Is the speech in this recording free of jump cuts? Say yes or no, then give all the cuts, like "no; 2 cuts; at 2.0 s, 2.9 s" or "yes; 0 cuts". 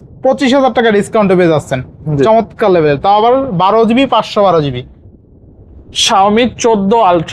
yes; 0 cuts